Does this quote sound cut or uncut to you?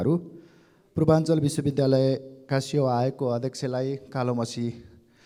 uncut